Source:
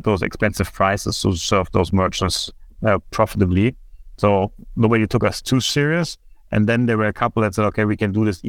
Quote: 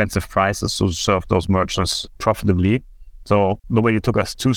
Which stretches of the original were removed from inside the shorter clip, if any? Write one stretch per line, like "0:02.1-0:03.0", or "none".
0:02.6-0:03.1
0:04.5-0:04.7